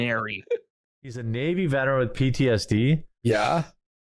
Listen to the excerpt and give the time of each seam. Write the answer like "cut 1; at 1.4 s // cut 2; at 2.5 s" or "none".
cut 1; at 1.2 s